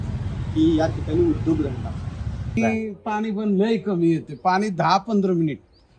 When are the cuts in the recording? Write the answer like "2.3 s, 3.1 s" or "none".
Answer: 2.6 s